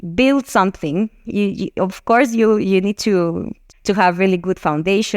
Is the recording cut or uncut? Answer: cut